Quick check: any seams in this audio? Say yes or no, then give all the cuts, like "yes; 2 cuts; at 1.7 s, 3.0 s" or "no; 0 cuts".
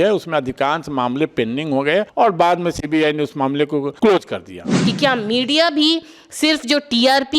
yes; 3 cuts; at 2.1 s, 3.9 s, 4.7 s